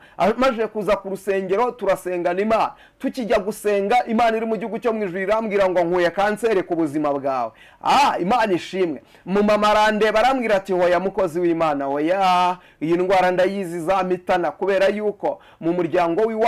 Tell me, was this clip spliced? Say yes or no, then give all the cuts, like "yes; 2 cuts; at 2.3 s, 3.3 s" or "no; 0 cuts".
no; 0 cuts